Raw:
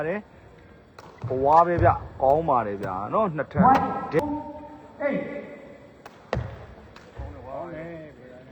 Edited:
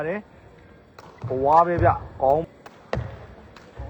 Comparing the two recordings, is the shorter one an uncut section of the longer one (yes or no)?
no